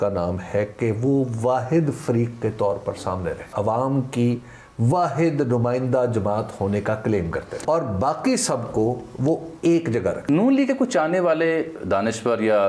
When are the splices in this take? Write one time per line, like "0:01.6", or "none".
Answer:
0:03.4
0:07.6
0:10.3